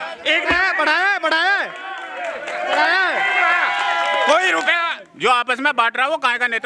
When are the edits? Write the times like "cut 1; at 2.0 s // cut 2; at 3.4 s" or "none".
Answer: cut 1; at 5.0 s

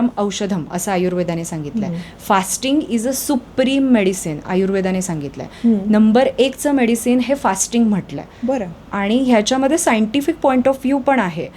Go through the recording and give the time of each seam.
none

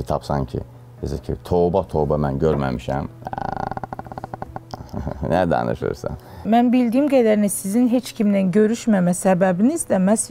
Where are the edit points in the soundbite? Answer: cut 1; at 6.4 s

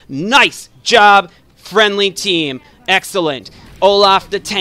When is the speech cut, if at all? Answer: none

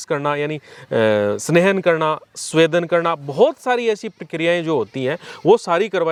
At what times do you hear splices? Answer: none

